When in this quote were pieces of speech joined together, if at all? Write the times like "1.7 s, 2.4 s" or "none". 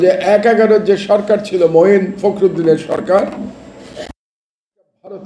none